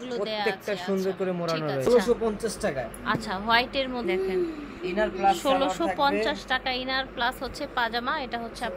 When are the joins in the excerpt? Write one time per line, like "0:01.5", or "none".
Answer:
0:01.8